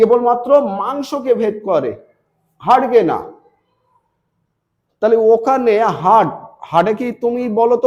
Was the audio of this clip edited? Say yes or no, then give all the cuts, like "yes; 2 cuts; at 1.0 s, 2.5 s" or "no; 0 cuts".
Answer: no; 0 cuts